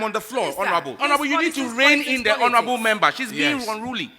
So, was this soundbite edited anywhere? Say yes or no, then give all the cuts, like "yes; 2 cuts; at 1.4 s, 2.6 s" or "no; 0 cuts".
yes; 1 cut; at 1.0 s